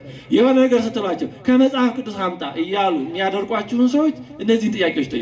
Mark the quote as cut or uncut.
uncut